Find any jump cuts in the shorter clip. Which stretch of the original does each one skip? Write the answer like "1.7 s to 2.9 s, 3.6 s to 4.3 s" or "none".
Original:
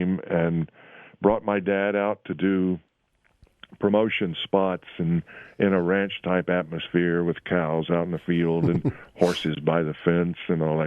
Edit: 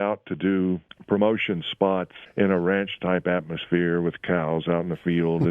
2.9 s to 3.6 s, 4.9 s to 5.4 s